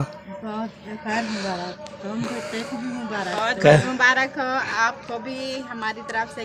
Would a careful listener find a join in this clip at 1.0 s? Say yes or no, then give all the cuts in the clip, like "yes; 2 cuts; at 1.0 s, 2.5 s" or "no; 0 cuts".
no; 0 cuts